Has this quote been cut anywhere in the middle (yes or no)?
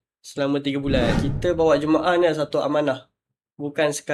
yes